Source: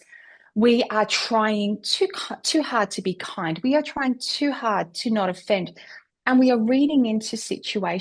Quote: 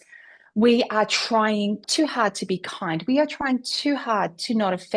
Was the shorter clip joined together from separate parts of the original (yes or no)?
yes